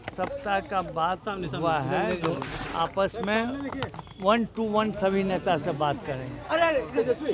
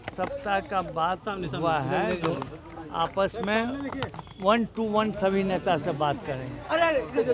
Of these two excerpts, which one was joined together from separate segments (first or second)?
first